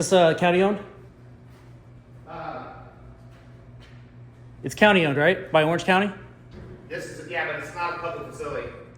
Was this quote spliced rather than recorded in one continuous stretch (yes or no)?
no